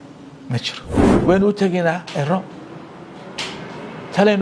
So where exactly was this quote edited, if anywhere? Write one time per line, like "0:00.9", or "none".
0:01.2